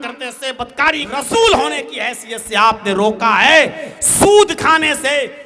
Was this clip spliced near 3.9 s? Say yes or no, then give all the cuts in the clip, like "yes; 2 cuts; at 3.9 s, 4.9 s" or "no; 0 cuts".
no; 1 cut; at 1.2 s